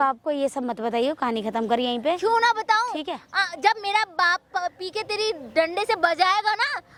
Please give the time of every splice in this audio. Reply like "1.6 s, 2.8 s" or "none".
none